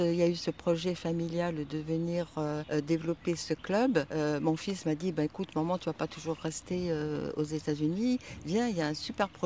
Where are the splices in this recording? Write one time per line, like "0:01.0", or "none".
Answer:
0:02.6
0:04.1